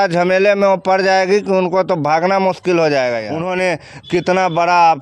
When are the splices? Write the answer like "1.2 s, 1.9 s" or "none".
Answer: 3.3 s